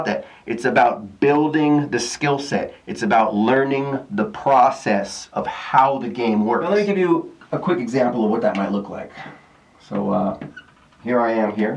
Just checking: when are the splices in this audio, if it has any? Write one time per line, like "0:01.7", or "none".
0:06.7